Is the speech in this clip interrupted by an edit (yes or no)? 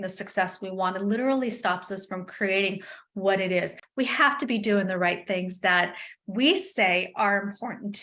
yes